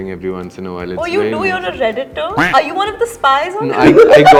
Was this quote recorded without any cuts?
yes; 0 cuts

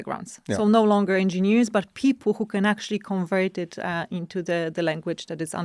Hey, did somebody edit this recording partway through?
no; 0 cuts

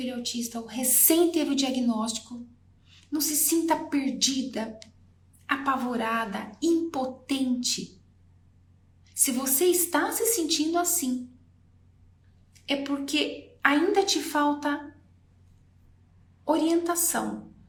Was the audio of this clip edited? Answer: no; 0 cuts

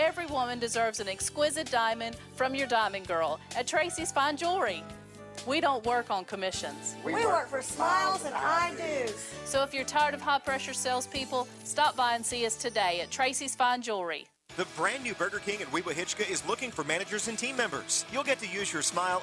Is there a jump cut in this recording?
yes; 1 cut; at 14.4 s

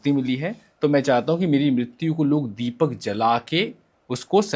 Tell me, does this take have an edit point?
no; 0 cuts

